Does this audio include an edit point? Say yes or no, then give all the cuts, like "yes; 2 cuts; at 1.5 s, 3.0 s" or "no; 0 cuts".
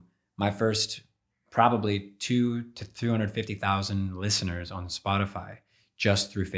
no; 0 cuts